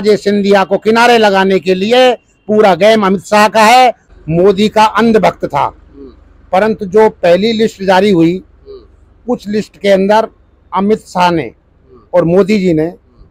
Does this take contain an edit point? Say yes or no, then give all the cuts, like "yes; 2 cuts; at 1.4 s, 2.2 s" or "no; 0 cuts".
yes; 1 cut; at 4.1 s